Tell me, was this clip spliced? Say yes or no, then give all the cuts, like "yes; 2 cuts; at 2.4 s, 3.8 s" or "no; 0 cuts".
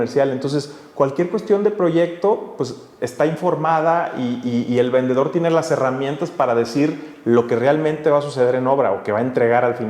no; 0 cuts